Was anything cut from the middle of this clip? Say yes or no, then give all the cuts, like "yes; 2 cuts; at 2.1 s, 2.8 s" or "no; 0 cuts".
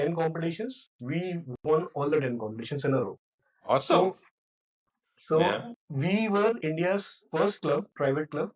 yes; 1 cut; at 4.5 s